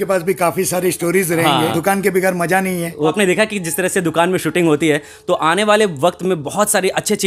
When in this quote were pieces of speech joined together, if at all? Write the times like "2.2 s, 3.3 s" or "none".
1.7 s, 3.1 s